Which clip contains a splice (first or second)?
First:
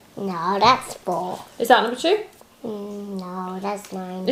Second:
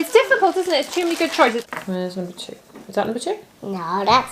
second